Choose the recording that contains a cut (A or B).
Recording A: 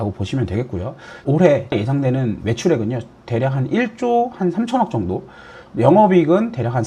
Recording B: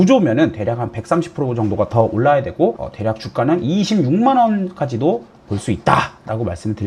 A